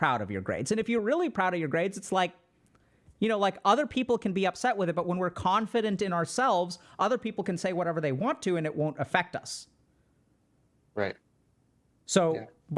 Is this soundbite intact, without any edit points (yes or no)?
yes